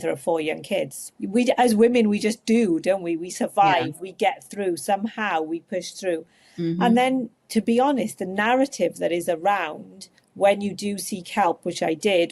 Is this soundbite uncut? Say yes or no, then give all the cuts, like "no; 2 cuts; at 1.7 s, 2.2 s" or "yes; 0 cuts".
no; 1 cut; at 1.0 s